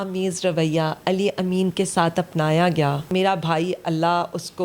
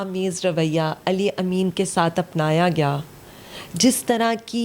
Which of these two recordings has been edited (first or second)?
first